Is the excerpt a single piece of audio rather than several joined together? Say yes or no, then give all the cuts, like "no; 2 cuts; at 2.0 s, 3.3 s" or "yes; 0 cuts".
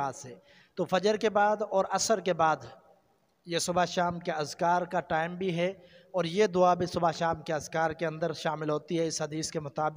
yes; 0 cuts